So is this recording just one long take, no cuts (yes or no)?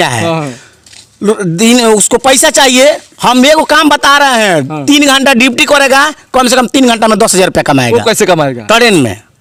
yes